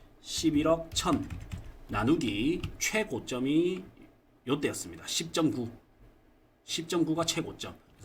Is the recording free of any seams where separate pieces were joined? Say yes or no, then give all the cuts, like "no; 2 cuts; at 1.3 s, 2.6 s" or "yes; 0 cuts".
yes; 0 cuts